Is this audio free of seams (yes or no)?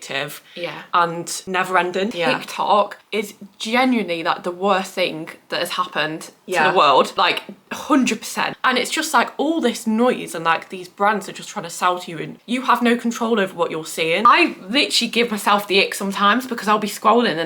no